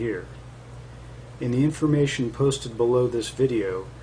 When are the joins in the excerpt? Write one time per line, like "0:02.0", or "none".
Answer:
0:01.6